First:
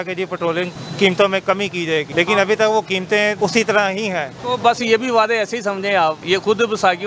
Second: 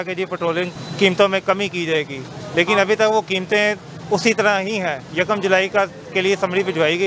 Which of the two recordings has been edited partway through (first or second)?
first